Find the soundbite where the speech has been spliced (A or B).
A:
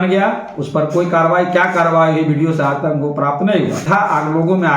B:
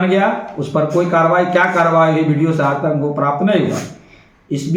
A